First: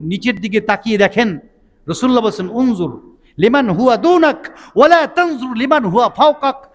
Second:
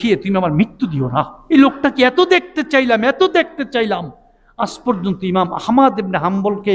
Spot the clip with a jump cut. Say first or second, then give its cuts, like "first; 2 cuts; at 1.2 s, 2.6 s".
second; 1 cut; at 1.4 s